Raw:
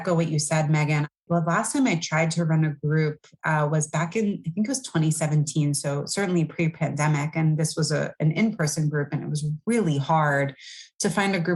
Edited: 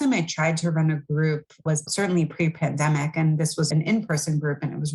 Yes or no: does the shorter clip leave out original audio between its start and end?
yes